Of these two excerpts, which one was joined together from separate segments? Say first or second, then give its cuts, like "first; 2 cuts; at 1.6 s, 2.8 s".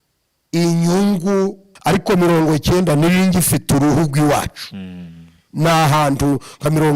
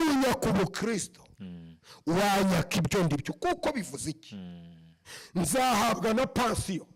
first; 1 cut; at 1.7 s